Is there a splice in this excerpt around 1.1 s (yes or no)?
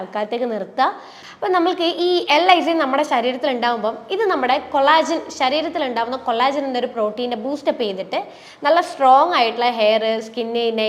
yes